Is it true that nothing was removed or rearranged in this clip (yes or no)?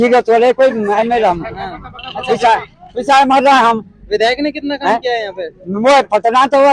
yes